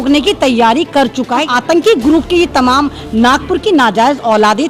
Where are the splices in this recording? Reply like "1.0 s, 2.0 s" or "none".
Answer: 1.4 s